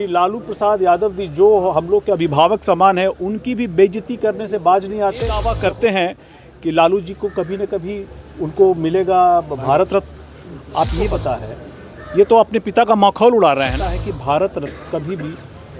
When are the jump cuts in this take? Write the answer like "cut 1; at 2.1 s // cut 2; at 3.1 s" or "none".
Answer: cut 1; at 5.5 s // cut 2; at 11.2 s // cut 3; at 14.1 s